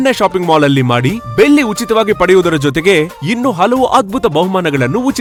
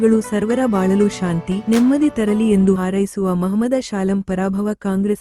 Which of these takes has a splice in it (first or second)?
second